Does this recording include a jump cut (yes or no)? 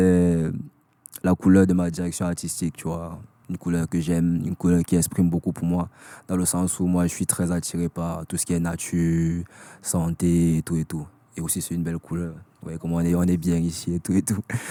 no